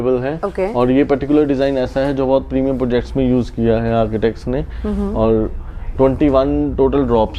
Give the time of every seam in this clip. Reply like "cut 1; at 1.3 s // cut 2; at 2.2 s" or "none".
none